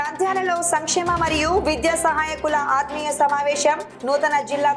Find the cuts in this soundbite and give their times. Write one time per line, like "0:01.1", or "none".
none